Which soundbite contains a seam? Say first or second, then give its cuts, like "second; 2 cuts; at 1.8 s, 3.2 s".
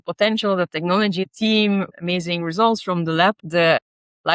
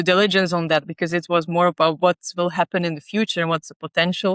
first; 3 cuts; at 1.2 s, 1.9 s, 3.4 s